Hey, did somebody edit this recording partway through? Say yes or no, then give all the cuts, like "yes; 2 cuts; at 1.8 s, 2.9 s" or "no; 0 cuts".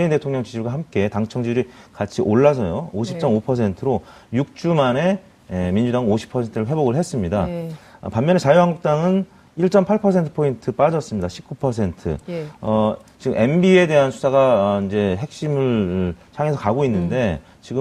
no; 0 cuts